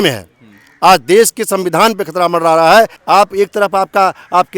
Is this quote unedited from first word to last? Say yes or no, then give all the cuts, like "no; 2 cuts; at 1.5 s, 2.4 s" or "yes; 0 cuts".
no; 1 cut; at 3.0 s